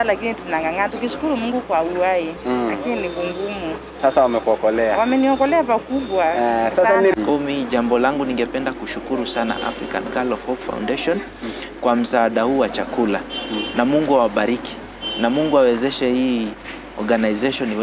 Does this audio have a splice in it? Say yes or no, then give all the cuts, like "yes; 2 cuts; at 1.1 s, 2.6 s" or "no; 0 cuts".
yes; 1 cut; at 7.1 s